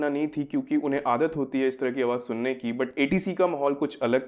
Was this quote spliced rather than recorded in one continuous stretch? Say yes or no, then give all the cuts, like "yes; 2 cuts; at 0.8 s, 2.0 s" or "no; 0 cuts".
no; 0 cuts